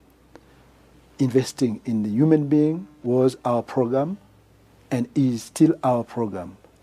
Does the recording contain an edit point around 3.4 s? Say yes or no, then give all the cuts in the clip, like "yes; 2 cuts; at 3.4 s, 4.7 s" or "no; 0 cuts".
no; 1 cut; at 1.1 s